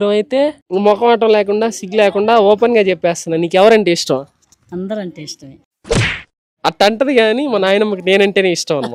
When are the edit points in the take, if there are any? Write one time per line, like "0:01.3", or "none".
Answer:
none